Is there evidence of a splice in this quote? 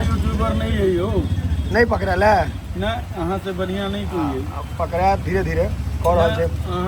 no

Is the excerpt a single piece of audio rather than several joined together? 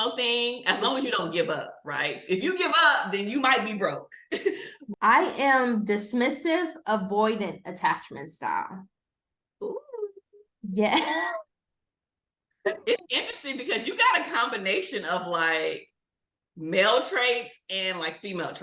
no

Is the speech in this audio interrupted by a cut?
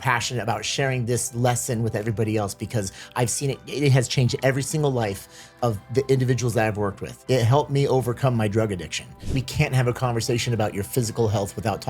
yes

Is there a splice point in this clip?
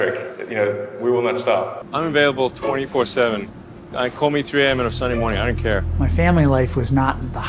yes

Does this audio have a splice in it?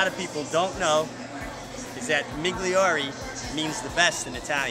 no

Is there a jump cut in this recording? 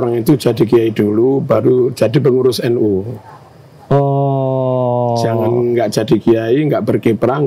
no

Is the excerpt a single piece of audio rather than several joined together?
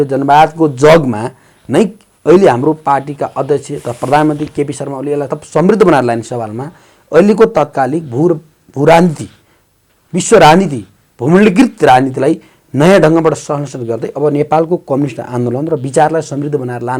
yes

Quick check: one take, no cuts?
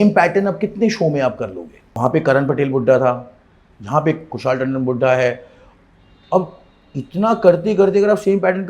no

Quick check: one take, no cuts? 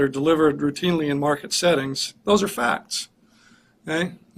no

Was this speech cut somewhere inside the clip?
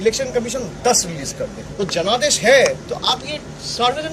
yes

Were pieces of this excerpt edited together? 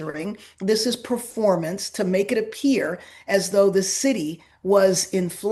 no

